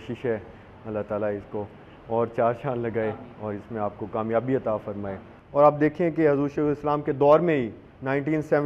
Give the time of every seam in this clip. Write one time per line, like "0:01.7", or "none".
0:05.3